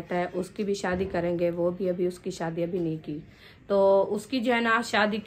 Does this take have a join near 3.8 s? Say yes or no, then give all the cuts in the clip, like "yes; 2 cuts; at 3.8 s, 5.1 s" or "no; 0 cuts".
yes; 1 cut; at 3.8 s